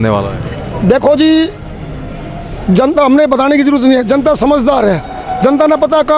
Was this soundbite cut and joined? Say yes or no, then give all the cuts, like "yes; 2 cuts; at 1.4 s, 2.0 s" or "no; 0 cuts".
no; 0 cuts